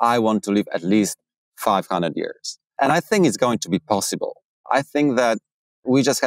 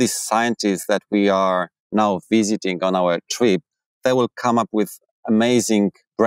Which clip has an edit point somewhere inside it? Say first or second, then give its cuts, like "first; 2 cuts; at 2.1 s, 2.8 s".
first; 2 cuts; at 2.7 s, 4.5 s